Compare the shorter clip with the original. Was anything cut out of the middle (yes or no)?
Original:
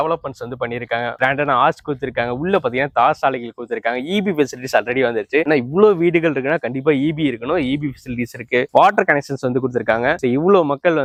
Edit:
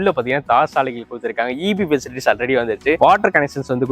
yes